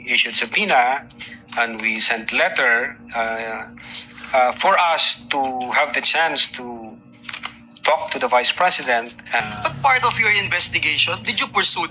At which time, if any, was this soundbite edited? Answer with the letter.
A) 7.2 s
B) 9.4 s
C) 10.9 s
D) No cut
B